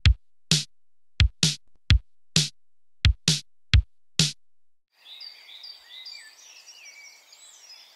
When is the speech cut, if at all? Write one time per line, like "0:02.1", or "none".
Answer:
none